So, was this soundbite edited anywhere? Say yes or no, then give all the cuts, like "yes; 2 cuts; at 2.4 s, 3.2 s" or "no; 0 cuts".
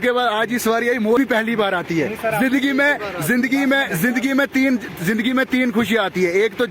yes; 1 cut; at 1.2 s